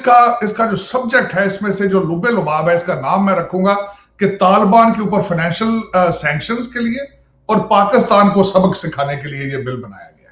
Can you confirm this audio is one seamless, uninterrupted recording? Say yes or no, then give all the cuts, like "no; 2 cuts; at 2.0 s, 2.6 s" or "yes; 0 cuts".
yes; 0 cuts